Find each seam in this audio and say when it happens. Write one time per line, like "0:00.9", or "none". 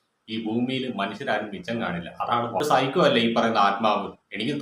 0:02.6